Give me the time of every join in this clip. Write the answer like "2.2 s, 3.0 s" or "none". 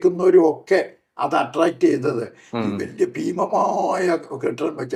none